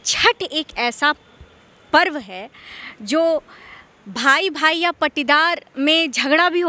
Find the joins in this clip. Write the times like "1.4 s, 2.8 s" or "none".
none